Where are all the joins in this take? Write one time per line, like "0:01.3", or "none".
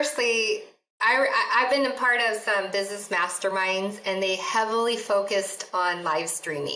none

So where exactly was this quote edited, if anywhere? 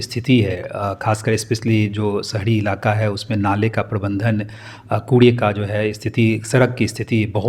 none

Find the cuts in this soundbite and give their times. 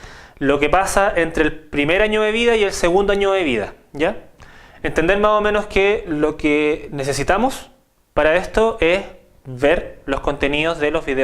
0:02.9

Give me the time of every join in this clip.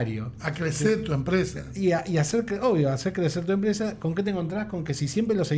none

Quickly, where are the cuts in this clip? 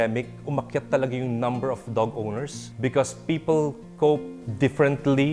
0:02.6

